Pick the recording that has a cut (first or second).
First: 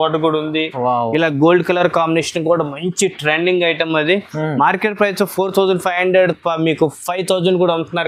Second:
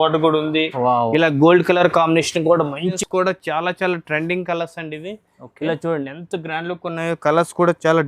second